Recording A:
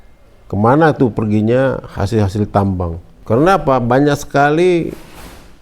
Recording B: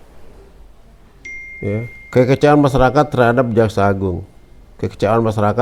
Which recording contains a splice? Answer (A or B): A